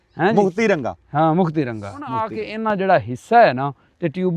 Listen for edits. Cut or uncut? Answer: cut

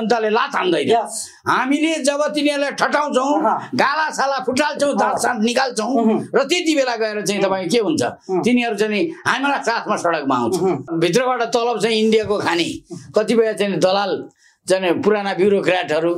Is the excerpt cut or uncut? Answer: cut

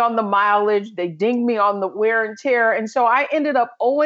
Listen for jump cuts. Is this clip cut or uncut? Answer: uncut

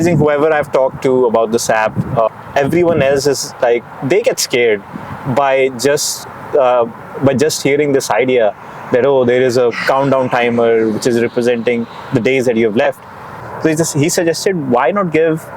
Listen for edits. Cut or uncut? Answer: cut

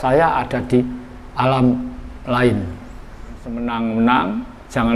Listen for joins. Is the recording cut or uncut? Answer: cut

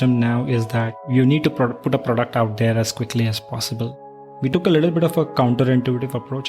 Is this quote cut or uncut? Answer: cut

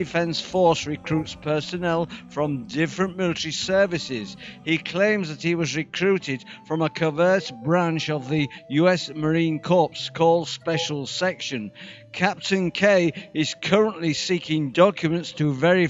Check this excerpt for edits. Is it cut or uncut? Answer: uncut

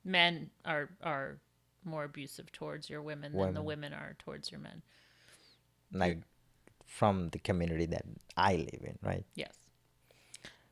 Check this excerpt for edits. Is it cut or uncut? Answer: uncut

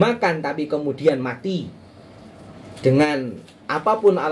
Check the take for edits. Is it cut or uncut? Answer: uncut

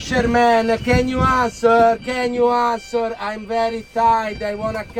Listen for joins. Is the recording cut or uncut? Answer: uncut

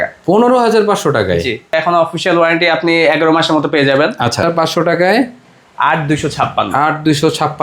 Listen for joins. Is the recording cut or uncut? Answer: cut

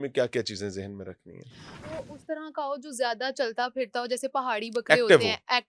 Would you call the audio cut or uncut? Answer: cut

